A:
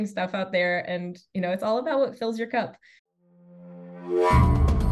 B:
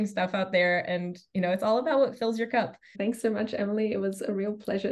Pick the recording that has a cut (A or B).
A